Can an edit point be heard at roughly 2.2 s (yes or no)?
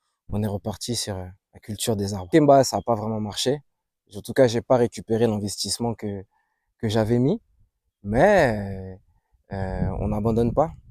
yes